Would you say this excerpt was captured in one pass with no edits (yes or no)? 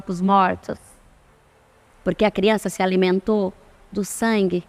yes